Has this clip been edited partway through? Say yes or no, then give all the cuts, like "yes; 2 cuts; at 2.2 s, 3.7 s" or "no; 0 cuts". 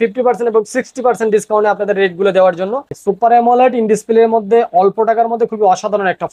yes; 1 cut; at 2.9 s